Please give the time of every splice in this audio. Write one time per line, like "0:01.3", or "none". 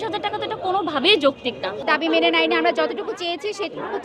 0:01.8